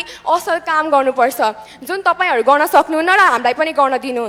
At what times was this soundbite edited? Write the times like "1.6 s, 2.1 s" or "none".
none